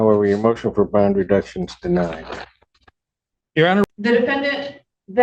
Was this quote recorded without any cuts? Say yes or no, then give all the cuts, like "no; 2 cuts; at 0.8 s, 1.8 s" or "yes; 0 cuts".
no; 1 cut; at 3.8 s